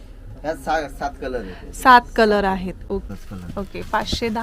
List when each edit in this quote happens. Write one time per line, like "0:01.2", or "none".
0:02.8